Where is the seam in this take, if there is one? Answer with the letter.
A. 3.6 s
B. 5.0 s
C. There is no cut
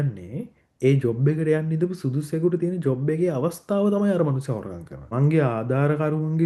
B